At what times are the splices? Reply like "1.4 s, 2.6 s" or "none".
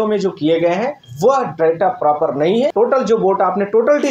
1.0 s, 2.7 s